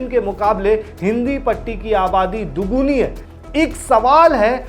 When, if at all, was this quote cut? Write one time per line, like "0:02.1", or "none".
0:03.2